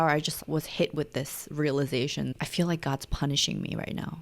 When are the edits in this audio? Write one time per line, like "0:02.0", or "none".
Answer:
0:02.3